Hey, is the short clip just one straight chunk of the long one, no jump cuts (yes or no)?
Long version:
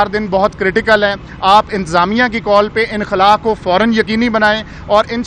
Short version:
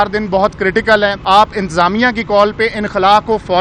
no